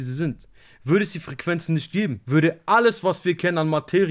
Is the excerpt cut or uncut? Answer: cut